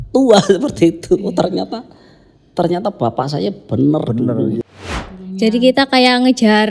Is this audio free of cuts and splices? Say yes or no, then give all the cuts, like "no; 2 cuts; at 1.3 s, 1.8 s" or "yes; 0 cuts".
no; 1 cut; at 4.6 s